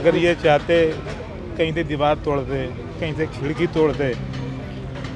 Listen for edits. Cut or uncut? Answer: uncut